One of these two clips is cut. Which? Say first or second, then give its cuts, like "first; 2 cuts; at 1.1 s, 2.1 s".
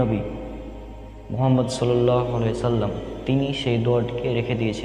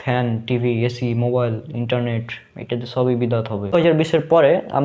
second; 1 cut; at 3.7 s